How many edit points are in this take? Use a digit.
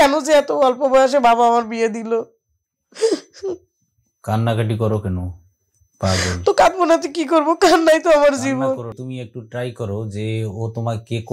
1